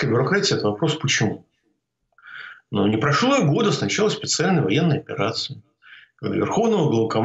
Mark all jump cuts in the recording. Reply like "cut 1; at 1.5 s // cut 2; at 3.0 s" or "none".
none